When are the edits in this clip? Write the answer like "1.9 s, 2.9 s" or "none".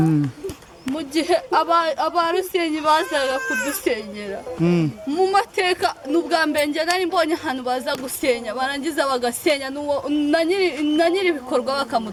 none